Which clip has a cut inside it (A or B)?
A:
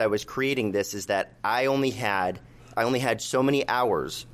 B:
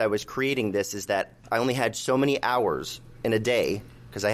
B